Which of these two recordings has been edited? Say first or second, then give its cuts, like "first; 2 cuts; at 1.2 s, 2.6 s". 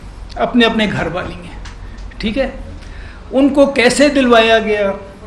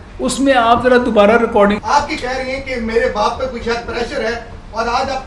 second; 1 cut; at 1.8 s